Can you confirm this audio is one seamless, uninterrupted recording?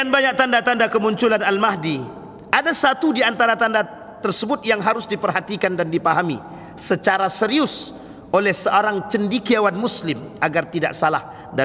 yes; 0 cuts

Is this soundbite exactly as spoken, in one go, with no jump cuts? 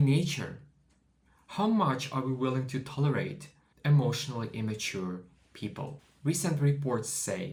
yes; 0 cuts

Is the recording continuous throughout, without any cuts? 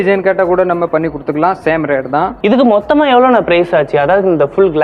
yes; 0 cuts

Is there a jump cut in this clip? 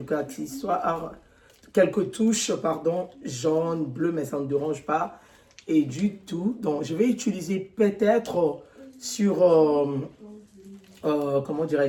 no; 0 cuts

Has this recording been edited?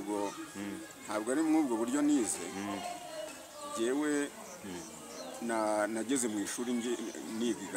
no; 0 cuts

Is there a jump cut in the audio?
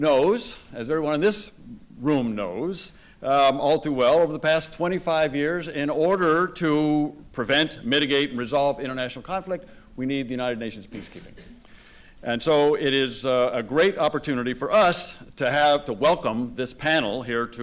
no; 0 cuts

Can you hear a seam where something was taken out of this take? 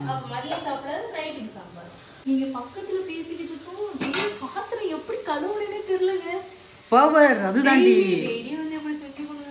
yes; 1 cut; at 2.2 s

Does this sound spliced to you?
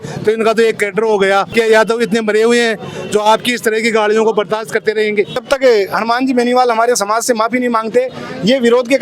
yes; 2 cuts; at 1.5 s, 5.4 s

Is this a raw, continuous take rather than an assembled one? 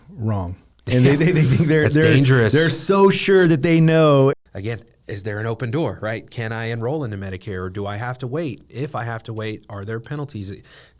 no; 1 cut; at 4.3 s

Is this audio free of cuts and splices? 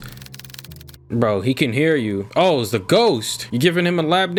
yes; 0 cuts

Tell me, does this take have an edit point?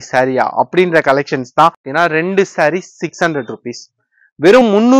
yes; 1 cut; at 1.9 s

